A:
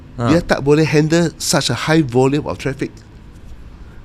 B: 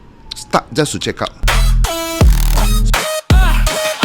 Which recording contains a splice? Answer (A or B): B